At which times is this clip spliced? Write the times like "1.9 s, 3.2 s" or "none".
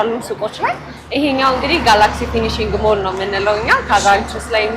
none